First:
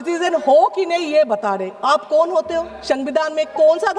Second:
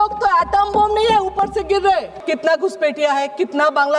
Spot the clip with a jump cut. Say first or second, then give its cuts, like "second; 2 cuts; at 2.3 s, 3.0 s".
second; 1 cut; at 2.2 s